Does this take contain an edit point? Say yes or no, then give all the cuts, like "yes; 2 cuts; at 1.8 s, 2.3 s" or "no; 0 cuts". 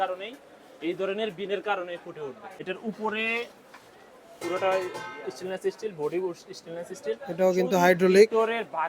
yes; 1 cut; at 2.5 s